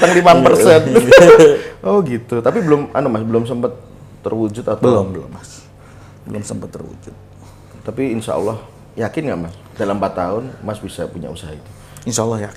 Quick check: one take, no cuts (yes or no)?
yes